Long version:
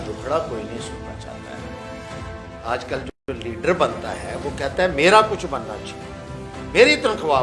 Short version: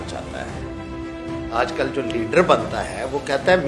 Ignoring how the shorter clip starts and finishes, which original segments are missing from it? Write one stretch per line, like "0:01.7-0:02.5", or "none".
0:03.0-0:03.2